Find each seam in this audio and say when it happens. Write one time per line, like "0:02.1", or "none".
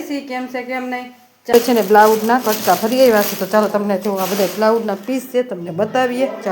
0:01.5